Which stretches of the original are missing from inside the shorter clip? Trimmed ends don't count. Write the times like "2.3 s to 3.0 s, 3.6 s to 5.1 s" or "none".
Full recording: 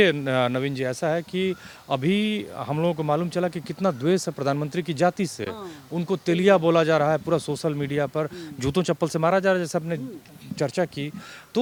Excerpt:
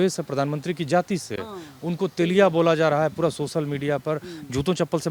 none